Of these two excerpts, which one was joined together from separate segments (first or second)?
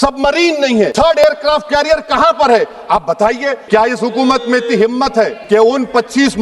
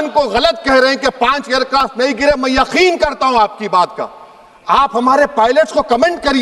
first